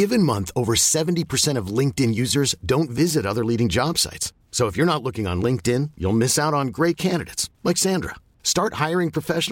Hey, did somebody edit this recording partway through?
no; 0 cuts

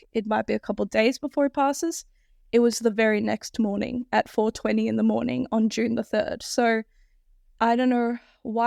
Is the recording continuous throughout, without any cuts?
yes; 0 cuts

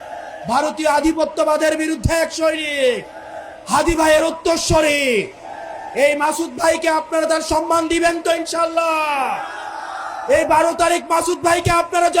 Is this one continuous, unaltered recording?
yes; 0 cuts

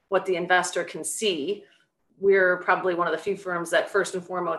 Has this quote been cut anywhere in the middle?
no; 0 cuts

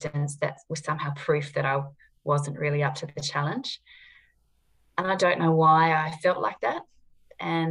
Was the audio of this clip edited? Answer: no; 0 cuts

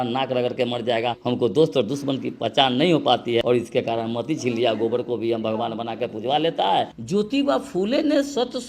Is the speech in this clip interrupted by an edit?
yes; 3 cuts; at 1.1 s, 3.4 s, 7.0 s

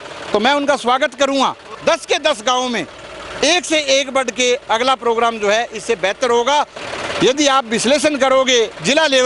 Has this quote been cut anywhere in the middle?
yes; 2 cuts; at 1.7 s, 6.8 s

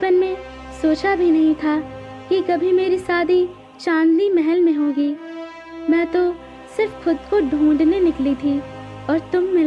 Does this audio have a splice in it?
no; 0 cuts

